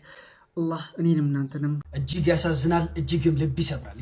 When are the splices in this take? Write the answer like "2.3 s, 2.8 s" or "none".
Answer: 1.9 s